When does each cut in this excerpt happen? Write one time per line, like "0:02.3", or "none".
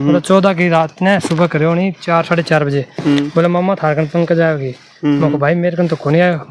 none

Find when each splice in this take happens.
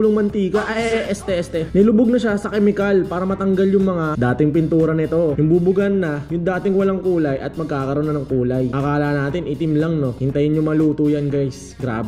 0:05.3

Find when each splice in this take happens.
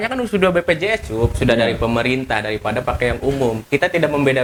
none

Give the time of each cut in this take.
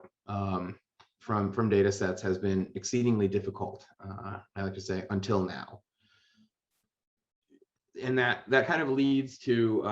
0:06.6

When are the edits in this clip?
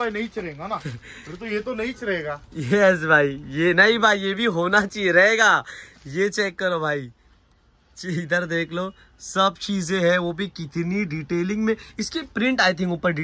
none

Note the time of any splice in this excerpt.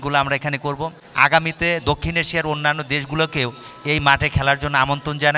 0:01.0

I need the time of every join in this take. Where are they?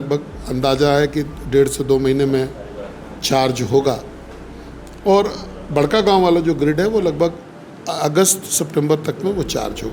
none

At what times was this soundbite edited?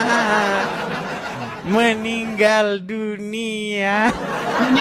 none

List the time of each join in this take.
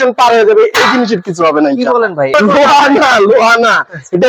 0:02.3

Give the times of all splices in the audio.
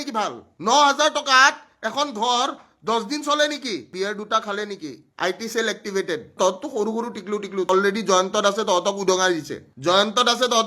0:03.9
0:06.3
0:07.7

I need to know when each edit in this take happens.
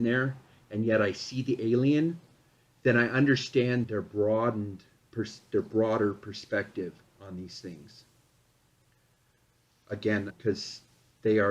0:03.8
0:10.3

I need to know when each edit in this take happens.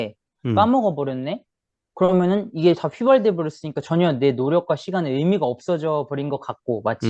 none

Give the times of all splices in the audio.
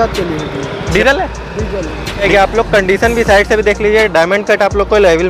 0:00.9
0:02.3

